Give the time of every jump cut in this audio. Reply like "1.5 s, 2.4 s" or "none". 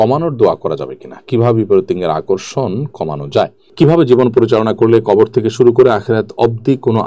3.6 s